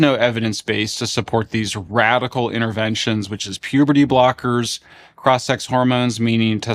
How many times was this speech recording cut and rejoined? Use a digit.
0